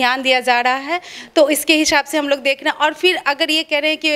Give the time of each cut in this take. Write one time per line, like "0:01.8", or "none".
none

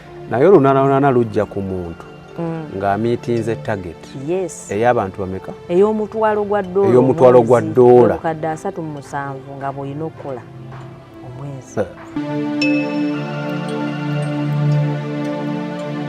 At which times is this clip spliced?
0:12.2

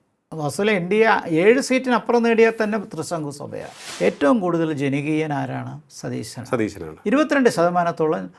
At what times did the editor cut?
0:03.8

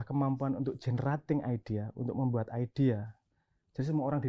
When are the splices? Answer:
none

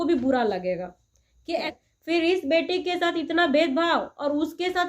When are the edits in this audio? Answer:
0:01.7

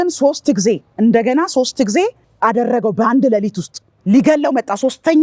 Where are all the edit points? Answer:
none

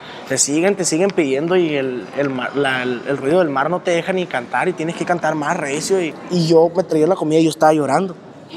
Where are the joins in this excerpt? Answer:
0:06.2

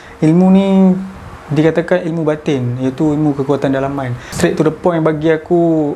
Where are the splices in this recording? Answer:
none

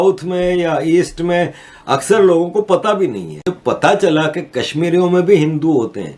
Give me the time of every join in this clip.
0:03.4

